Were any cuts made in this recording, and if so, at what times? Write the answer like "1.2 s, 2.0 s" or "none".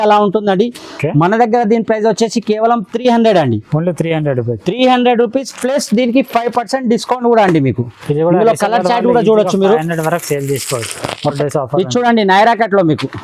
11.4 s